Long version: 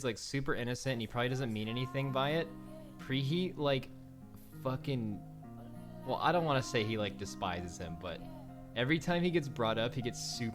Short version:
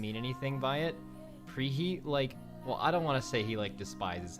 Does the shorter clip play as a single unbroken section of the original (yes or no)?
no